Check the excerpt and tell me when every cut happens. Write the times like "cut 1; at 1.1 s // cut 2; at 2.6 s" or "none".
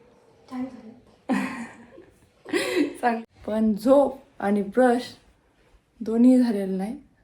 cut 1; at 3.2 s